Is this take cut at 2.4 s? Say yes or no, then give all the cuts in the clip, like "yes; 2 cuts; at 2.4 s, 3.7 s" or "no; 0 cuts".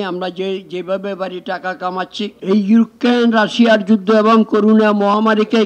yes; 1 cut; at 2.4 s